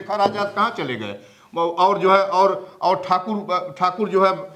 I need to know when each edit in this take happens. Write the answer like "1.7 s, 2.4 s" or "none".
none